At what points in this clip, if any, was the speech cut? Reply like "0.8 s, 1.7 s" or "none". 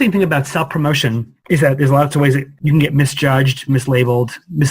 1.3 s, 2.5 s